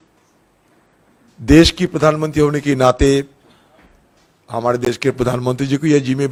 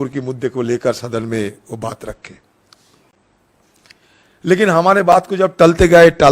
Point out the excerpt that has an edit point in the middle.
second; 1 cut; at 3.1 s

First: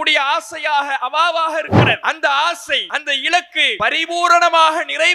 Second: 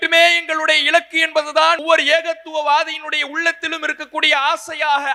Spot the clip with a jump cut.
first; 3 cuts; at 2.0 s, 2.9 s, 3.7 s

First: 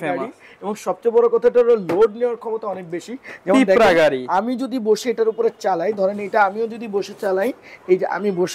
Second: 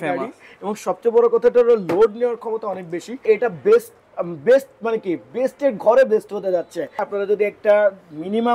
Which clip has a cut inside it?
second; 2 cuts; at 3.2 s, 7.1 s

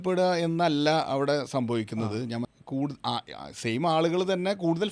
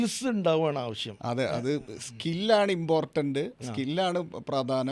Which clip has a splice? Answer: first; 1 cut; at 2.5 s

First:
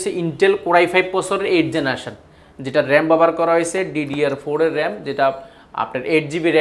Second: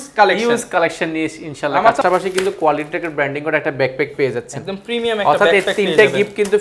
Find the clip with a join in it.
second; 1 cut; at 2.0 s

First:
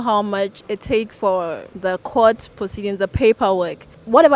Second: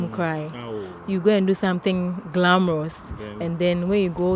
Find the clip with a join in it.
first; 1 cut; at 1.1 s

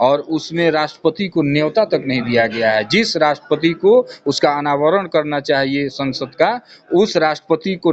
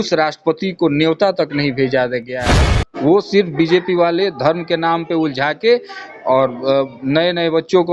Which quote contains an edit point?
second; 1 cut; at 2.4 s

